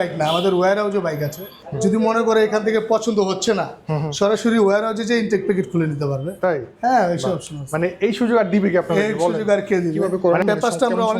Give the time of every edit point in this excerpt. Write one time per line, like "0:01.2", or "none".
0:01.6
0:10.1

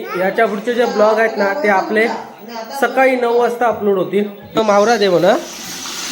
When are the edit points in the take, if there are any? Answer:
0:04.6

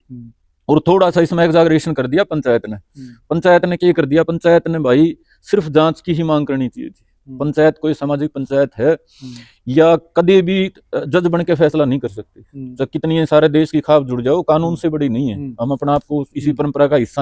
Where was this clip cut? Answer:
none

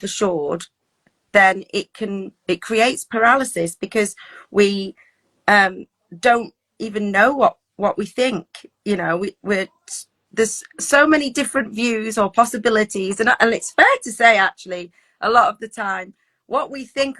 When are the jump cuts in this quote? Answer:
none

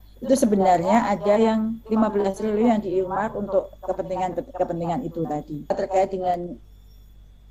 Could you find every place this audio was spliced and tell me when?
0:05.8

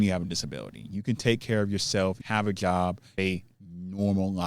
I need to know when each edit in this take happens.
0:02.2
0:03.2

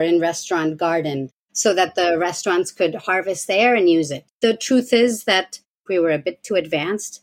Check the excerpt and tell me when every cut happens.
0:04.2
0:05.9

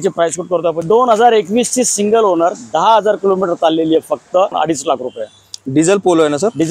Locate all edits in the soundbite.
0:00.8
0:04.5

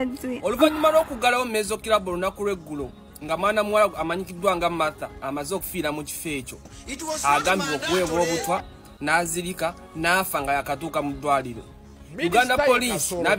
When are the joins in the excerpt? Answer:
none

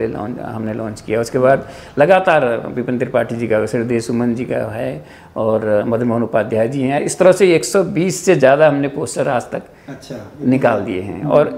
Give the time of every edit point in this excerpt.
none

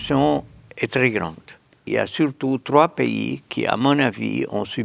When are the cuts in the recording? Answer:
0:01.8

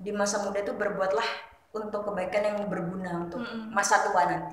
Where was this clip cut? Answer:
none

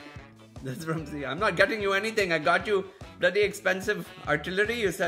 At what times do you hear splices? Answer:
0:04.1

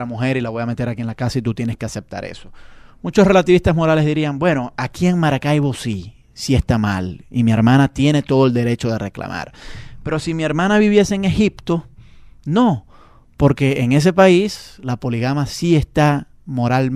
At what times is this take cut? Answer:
none

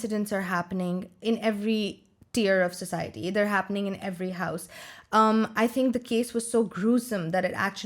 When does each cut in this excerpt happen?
0:01.1

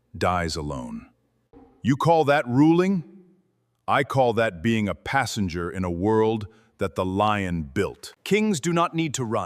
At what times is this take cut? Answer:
0:08.1

